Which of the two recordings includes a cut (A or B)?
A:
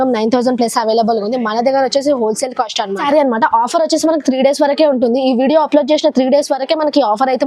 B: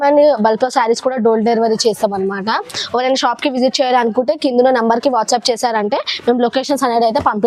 A